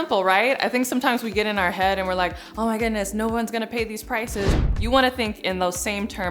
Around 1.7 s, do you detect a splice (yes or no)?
no